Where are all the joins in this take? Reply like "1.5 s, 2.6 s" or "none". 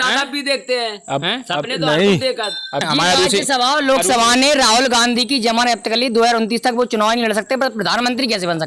2.9 s